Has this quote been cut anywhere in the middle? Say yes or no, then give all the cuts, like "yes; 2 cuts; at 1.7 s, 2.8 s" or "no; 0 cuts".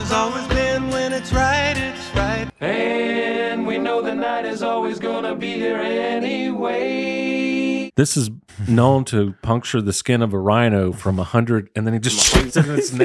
yes; 2 cuts; at 2.5 s, 7.9 s